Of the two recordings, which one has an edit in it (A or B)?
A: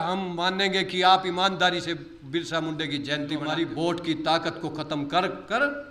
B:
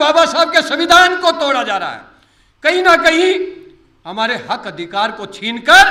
A